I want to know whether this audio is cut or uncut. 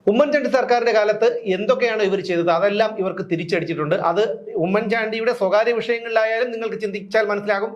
uncut